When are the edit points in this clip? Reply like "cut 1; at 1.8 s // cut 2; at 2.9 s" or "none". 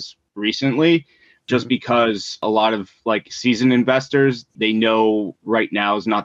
cut 1; at 1.4 s // cut 2; at 2.4 s // cut 3; at 4.5 s